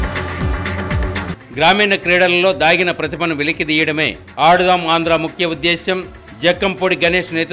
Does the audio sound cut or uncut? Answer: cut